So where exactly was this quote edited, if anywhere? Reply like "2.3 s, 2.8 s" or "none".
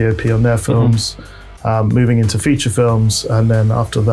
none

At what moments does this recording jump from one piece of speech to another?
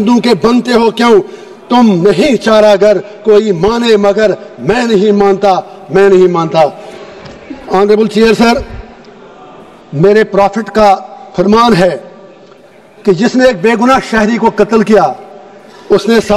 none

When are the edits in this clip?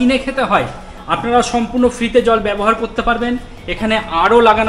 none

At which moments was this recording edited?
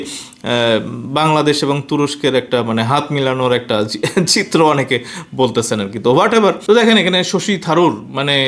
6.6 s

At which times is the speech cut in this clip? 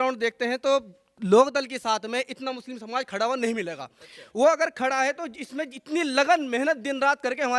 none

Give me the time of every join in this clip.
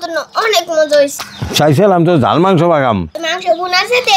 1.1 s

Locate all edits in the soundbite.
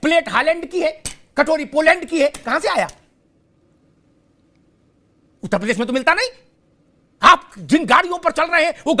none

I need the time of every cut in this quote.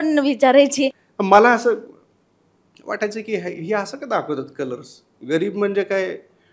1.1 s

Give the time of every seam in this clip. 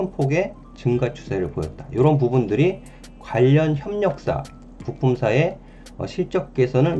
none

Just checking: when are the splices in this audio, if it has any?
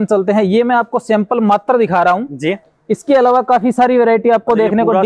none

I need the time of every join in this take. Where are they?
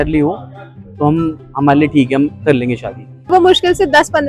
3.3 s

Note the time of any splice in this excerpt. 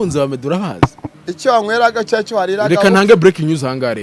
1.0 s

